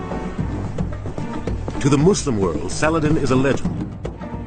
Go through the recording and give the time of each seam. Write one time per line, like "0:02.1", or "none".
0:01.3